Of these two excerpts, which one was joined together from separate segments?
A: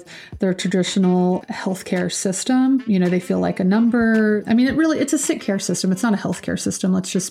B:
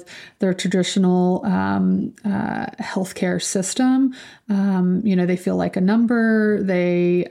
A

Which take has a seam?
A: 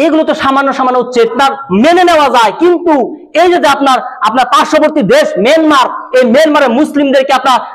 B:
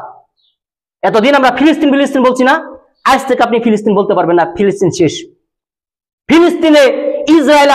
A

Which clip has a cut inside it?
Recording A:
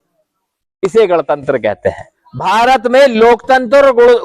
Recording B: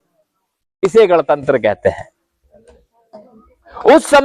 A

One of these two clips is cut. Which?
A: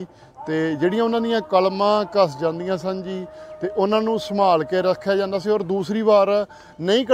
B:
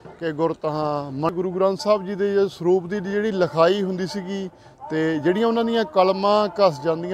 B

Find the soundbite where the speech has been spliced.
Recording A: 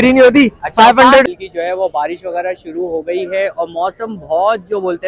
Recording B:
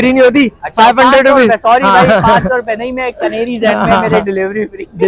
A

